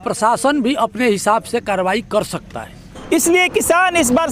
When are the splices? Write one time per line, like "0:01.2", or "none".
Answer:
none